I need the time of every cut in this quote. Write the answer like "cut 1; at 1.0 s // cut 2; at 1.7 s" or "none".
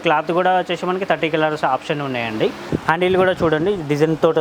cut 1; at 2.6 s

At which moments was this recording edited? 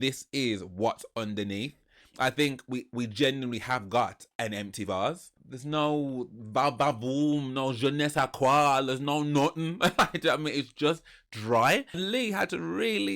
cut 1; at 5.4 s // cut 2; at 12.0 s

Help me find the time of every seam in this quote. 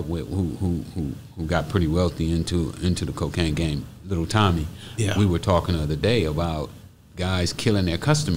none

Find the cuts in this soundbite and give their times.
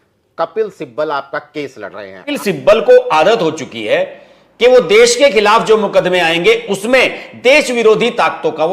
cut 1; at 2.3 s

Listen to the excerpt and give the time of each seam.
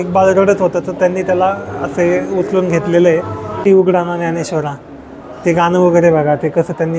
cut 1; at 3.6 s

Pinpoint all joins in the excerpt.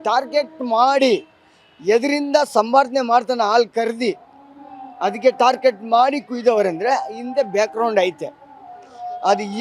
none

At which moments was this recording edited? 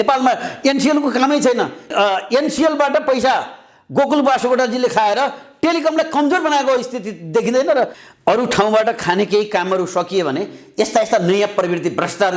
cut 1; at 1.9 s // cut 2; at 8.0 s

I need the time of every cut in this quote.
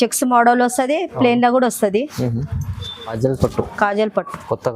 cut 1; at 3.1 s

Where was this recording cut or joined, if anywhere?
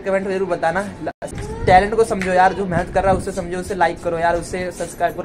cut 1; at 1.1 s

